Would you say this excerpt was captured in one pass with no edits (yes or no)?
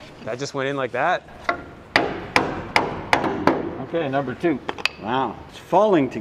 yes